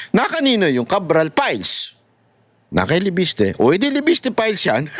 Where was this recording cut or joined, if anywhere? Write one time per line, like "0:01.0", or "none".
none